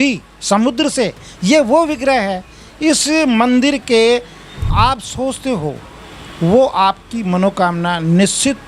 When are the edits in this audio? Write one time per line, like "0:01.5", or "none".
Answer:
0:04.7